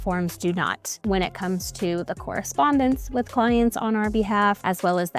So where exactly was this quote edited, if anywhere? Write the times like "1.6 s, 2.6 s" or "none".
none